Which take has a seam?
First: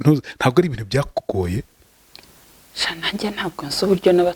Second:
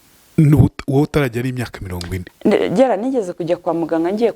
second; 1 cut; at 2.2 s

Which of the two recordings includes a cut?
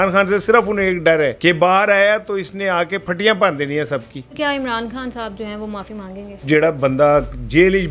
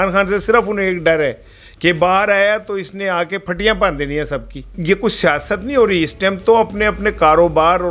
first; 3 cuts; at 1.3 s, 4.2 s, 6.4 s

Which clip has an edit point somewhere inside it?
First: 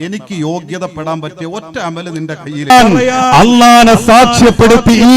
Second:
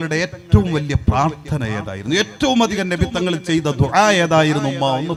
first; 1 cut; at 2.7 s

